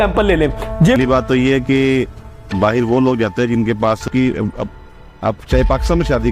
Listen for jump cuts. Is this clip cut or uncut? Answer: cut